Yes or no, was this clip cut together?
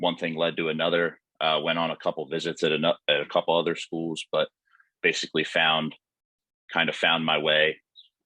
no